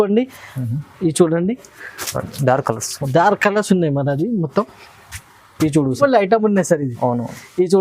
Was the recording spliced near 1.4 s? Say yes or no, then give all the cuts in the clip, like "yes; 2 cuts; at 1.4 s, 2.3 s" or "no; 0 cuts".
no; 1 cut; at 5.9 s